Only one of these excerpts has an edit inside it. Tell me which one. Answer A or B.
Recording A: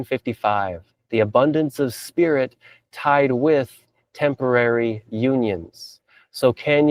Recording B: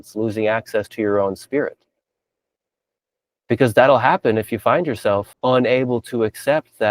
B